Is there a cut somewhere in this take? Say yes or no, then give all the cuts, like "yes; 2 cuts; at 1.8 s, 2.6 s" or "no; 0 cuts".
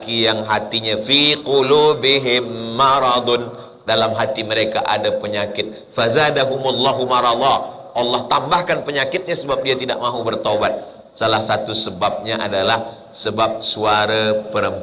no; 0 cuts